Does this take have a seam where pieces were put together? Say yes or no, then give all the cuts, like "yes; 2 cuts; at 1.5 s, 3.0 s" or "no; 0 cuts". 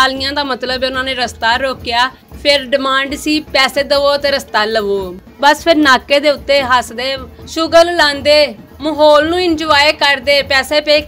no; 0 cuts